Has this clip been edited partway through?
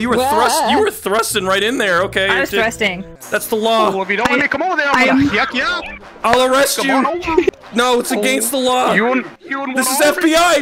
yes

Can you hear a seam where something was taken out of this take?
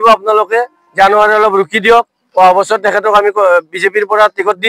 no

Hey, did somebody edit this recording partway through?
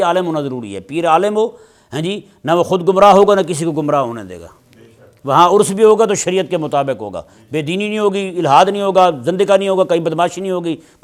no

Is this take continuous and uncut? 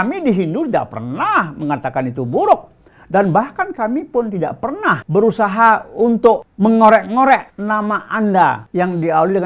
no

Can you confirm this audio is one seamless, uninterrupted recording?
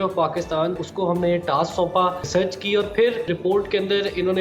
no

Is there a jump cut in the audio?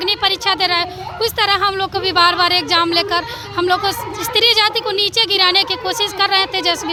no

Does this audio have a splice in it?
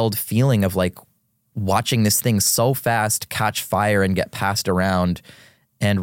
no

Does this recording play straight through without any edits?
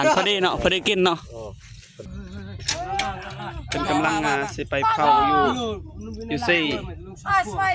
no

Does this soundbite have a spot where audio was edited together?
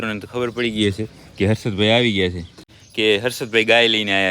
yes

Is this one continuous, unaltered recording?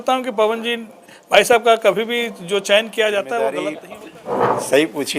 no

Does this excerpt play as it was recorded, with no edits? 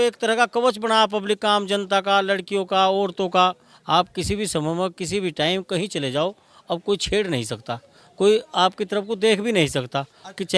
yes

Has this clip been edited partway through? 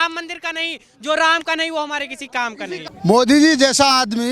yes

